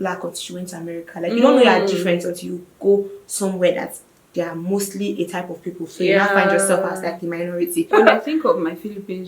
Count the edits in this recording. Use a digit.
1